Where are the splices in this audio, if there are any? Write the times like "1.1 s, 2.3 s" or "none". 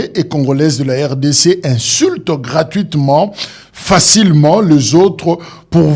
none